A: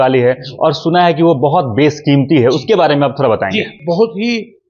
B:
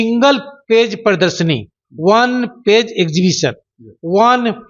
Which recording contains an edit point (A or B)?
A